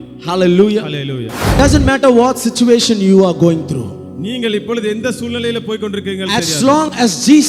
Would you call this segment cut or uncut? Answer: cut